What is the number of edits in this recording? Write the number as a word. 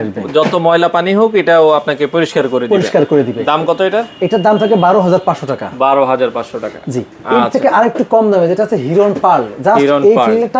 zero